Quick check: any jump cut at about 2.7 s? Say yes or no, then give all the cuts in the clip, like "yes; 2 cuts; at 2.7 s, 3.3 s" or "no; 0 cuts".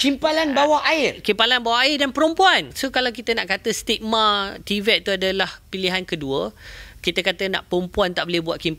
yes; 1 cut; at 2.7 s